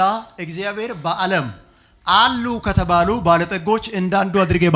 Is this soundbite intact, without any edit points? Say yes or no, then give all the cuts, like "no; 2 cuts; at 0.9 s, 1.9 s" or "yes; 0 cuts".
yes; 0 cuts